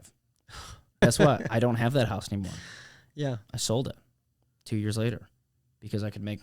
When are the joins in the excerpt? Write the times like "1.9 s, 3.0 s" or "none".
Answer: 1.0 s